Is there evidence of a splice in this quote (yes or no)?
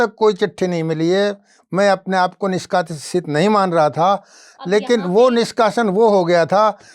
no